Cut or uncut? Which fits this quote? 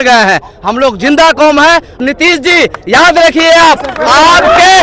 cut